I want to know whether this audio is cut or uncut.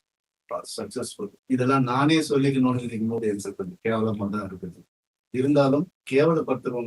cut